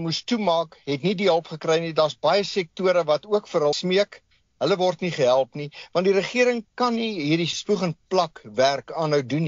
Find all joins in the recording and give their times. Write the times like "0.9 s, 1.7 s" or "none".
3.8 s, 7.6 s

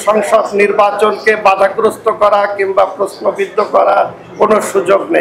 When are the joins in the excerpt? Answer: none

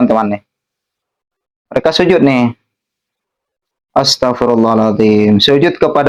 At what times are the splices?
none

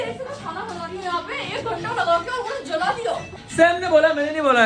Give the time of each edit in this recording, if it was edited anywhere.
none

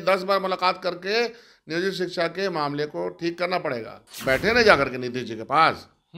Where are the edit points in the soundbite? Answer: 4.1 s

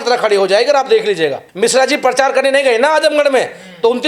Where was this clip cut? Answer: 1.4 s

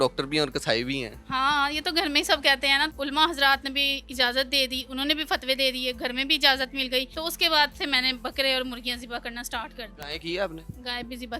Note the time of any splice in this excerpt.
1.1 s, 2.9 s, 7.1 s, 9.9 s

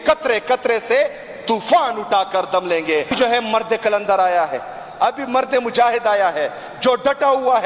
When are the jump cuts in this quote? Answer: 3.1 s

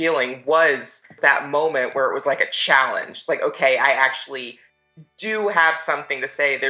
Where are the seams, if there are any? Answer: 1.1 s

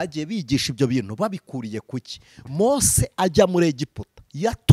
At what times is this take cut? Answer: 2.4 s

